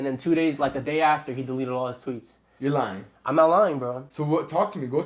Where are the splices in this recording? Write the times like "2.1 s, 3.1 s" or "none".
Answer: none